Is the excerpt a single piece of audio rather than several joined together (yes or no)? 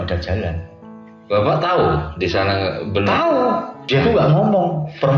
no